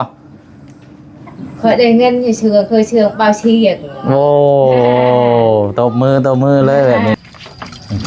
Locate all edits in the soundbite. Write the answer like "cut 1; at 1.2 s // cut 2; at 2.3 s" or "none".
cut 1; at 7.2 s